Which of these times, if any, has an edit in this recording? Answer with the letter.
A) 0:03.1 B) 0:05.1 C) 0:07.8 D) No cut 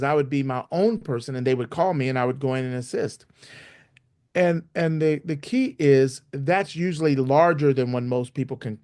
D